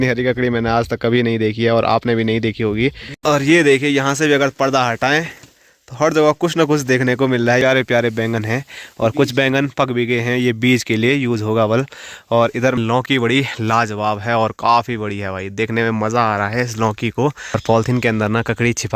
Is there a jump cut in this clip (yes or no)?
yes